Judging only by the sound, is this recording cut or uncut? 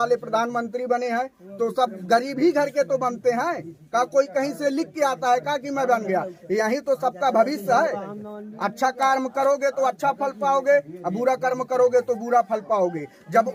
uncut